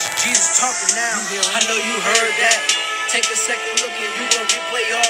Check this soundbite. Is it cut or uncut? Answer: uncut